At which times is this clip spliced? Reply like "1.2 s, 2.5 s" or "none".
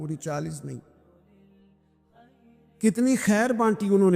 1.5 s, 2.8 s